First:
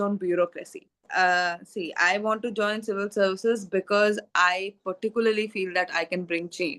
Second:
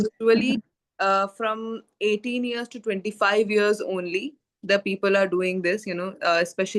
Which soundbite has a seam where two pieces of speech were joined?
first; 1 cut; at 1.0 s

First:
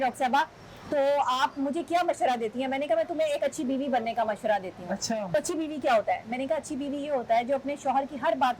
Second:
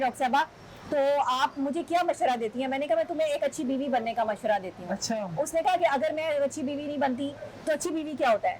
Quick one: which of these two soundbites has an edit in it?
first; 1 cut; at 5.3 s

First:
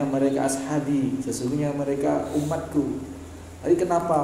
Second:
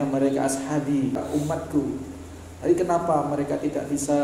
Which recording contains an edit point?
second; 1 cut; at 1.2 s

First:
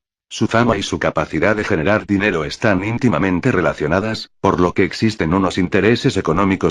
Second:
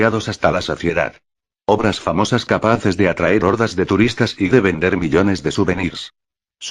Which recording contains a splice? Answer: first; 1 cut; at 2.2 s

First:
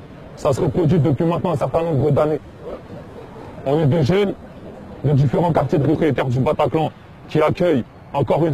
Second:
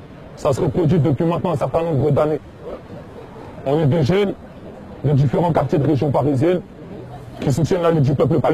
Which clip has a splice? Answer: second; 1 cut; at 6.0 s

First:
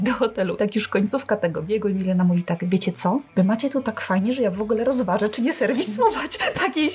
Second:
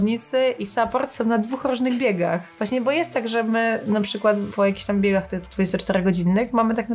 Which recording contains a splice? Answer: second; 2 cuts; at 2.5 s, 4.5 s

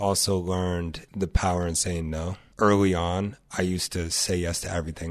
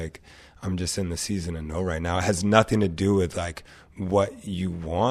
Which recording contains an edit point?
first; 2 cuts; at 1.0 s, 2.4 s

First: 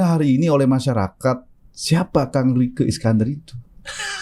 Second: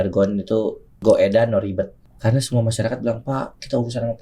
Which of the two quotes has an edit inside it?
second; 2 cuts; at 0.9 s, 2.0 s

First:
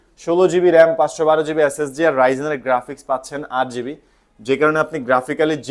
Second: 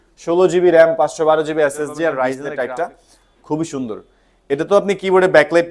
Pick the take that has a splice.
second; 1 cut; at 2.4 s

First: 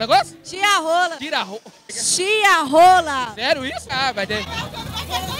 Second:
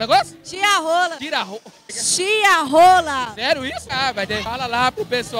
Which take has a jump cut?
second; 1 cut; at 4.4 s

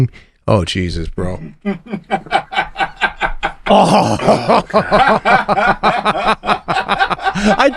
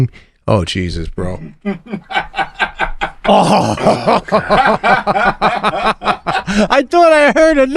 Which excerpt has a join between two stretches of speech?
second; 2 cuts; at 2.0 s, 6.5 s

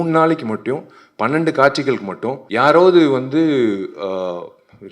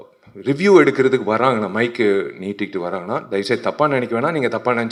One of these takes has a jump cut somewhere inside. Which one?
first; 1 cut; at 2.4 s

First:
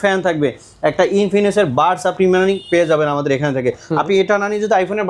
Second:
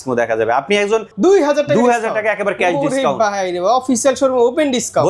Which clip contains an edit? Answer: second; 1 cut; at 1.1 s

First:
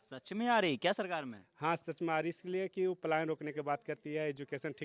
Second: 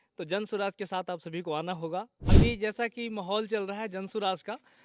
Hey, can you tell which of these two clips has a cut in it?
second; 1 cut; at 2.2 s

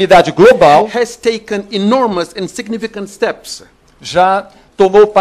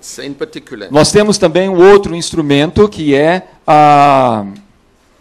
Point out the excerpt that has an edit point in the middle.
second; 1 cut; at 2.6 s

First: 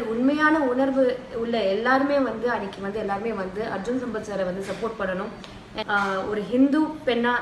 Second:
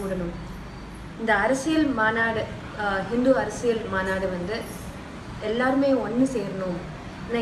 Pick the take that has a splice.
first; 1 cut; at 5.7 s

